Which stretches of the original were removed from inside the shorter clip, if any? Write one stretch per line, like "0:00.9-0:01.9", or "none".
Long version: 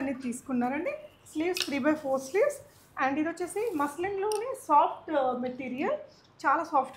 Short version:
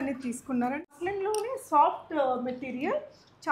0:00.9-0:03.9